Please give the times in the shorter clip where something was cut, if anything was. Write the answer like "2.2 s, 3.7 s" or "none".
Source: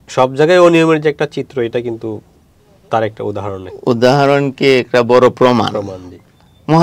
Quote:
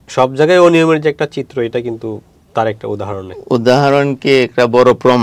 2.3 s